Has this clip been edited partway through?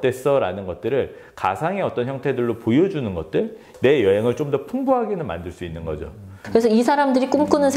yes; 2 cuts; at 3.6 s, 6.4 s

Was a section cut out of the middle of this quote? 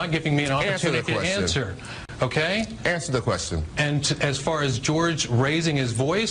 no; 0 cuts

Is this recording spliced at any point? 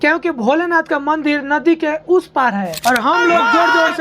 yes; 1 cut; at 2.7 s

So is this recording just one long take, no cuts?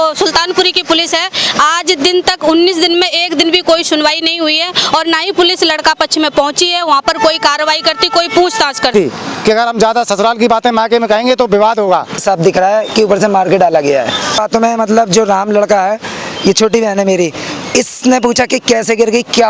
no; 3 cuts; at 8.9 s, 12.2 s, 14.4 s

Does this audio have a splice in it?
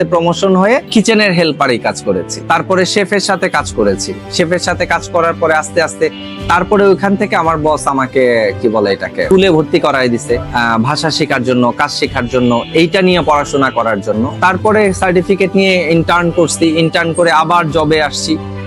no; 0 cuts

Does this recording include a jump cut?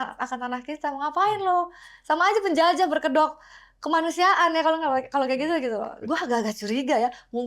no; 0 cuts

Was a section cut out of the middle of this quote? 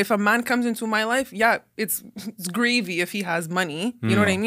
no; 0 cuts

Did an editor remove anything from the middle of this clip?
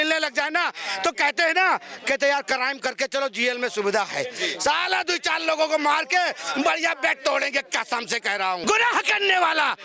yes; 1 cut; at 8.6 s

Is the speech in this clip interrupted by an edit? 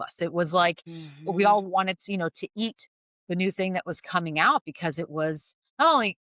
no; 0 cuts

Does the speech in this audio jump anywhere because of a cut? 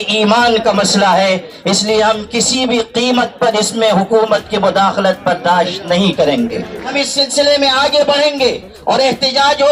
yes; 1 cut; at 6.9 s

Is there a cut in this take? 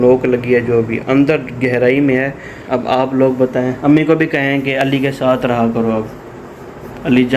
yes; 1 cut; at 2.6 s

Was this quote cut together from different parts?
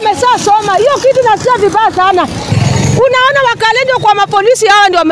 yes; 1 cut; at 2.5 s

